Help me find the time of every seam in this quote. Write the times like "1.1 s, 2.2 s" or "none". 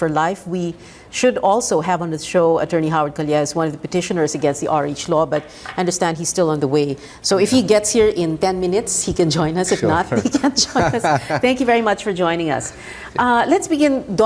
5.2 s